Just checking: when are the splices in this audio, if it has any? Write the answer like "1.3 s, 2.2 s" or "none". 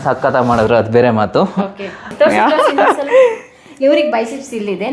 2.1 s